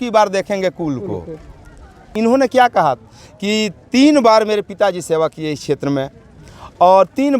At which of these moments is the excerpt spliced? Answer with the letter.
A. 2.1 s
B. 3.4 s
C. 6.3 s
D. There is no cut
A